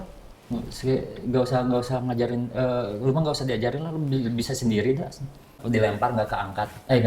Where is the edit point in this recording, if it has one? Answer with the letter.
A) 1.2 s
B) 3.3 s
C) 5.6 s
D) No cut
C